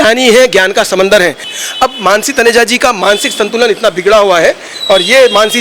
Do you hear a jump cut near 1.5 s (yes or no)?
yes